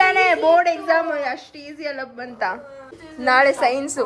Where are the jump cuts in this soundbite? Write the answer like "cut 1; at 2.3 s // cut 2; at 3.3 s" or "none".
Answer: cut 1; at 3.0 s